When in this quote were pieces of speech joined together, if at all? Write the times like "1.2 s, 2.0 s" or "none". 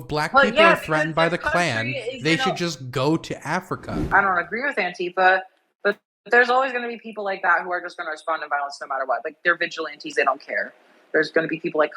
4.1 s